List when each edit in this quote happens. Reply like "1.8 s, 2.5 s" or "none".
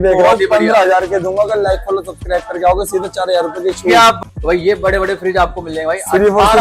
4.2 s

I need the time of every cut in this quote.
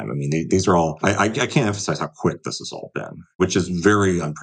1.0 s, 3.4 s

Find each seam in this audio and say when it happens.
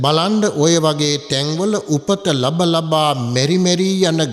none

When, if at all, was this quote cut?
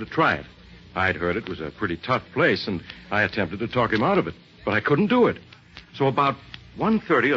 1.6 s

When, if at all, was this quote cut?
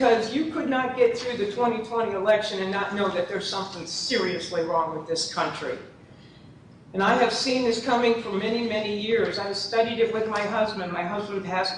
none

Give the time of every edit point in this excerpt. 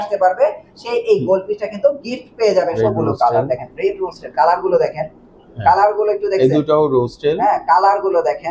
2.8 s

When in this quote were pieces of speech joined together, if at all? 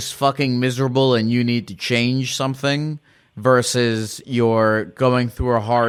none

